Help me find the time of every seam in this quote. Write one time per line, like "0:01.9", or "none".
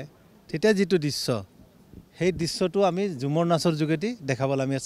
none